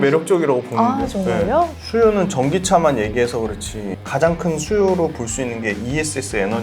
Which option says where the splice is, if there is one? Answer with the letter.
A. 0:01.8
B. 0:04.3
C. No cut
A